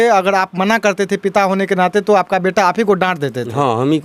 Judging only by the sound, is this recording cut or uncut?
uncut